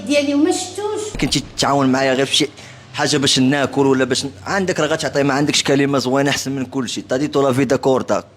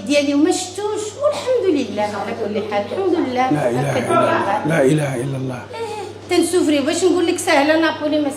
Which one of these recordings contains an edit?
first; 1 cut; at 1.1 s

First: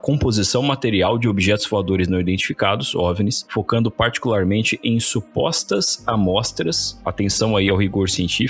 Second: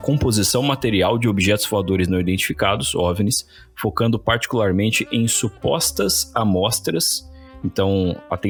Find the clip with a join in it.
first; 2 cuts; at 3.4 s, 7.0 s

